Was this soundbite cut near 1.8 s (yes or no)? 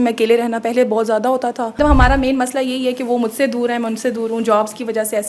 yes